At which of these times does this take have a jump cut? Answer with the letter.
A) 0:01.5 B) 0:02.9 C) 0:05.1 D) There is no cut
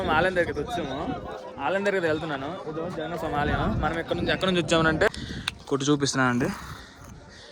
C